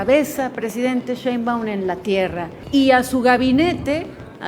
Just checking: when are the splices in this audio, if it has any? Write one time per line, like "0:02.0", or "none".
0:02.5

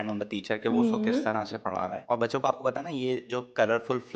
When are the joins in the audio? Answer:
0:01.9

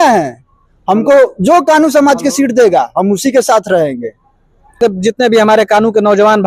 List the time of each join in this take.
0:04.8

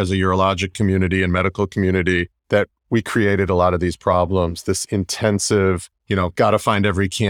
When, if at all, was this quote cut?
0:02.3
0:05.9

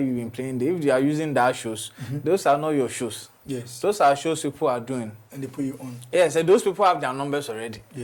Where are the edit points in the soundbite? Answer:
none

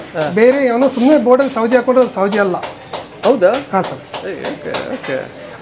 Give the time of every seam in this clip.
none

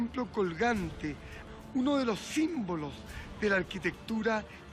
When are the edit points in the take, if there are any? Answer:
none

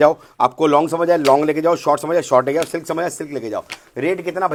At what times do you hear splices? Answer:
none

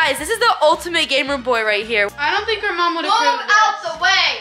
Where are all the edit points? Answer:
0:02.1

